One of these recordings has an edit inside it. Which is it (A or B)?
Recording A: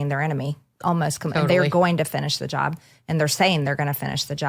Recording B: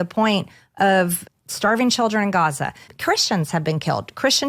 B